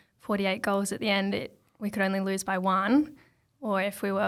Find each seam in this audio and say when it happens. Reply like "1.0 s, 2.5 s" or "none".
none